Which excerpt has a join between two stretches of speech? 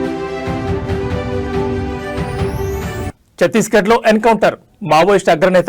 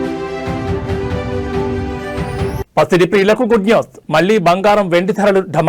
first; 1 cut; at 2.6 s

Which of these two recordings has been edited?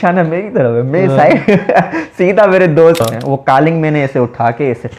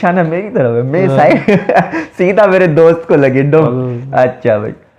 first; 1 cut; at 3.0 s

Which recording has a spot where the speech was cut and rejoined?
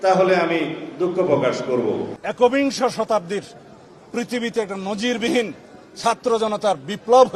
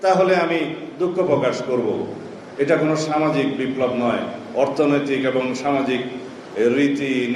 first; 1 cut; at 2.2 s

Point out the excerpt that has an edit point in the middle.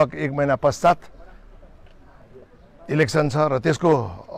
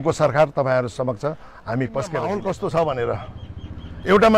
second; 1 cut; at 2.3 s

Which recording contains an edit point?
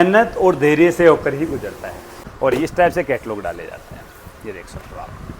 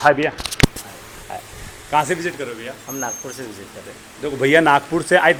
first; 1 cut; at 2.1 s

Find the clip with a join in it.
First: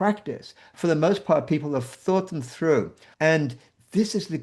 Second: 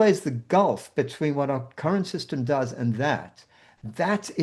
first; 1 cut; at 3.0 s

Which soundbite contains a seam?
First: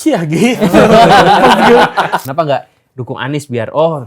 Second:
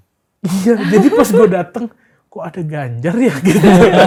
first; 1 cut; at 2.2 s

